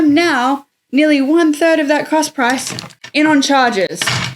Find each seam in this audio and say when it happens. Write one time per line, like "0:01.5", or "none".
none